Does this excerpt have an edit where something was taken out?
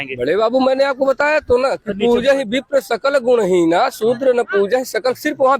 no; 0 cuts

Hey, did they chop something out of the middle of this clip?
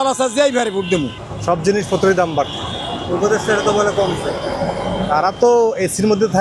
yes; 1 cut; at 1.2 s

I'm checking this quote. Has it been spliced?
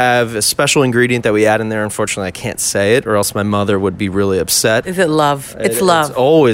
yes; 1 cut; at 4.9 s

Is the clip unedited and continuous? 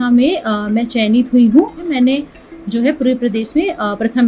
no; 1 cut; at 1.9 s

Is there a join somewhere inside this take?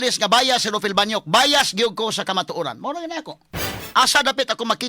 yes; 1 cut; at 3.8 s

